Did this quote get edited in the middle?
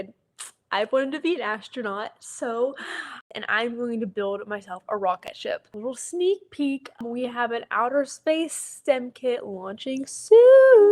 yes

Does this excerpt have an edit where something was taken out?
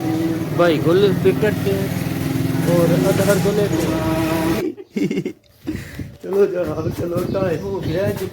yes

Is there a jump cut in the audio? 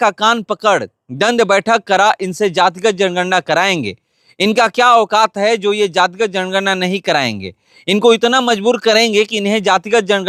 no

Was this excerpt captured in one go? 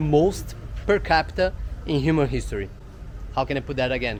yes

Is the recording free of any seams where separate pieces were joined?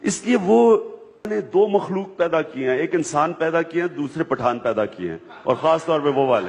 no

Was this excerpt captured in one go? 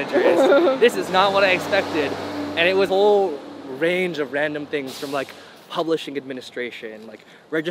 yes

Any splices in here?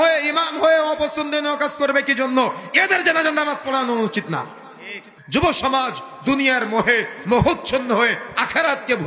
yes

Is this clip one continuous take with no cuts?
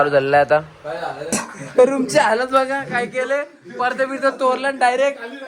no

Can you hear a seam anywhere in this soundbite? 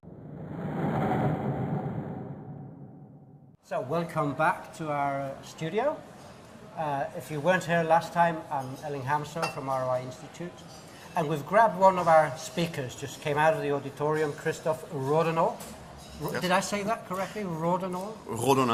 no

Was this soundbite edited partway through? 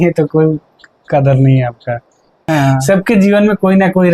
yes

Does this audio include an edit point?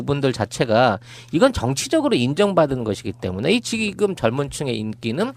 yes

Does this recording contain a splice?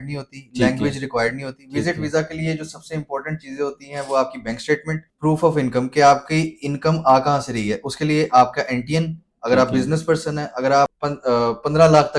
yes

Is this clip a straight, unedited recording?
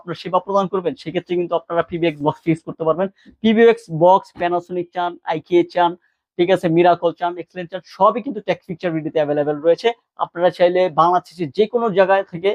yes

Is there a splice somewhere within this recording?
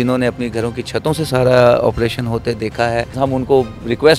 yes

